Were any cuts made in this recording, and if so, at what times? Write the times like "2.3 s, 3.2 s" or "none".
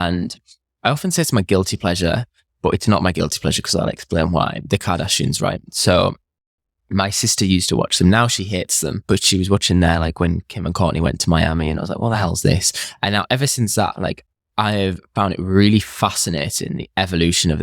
9.0 s